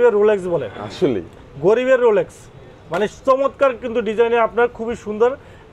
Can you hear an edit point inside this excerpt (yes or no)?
no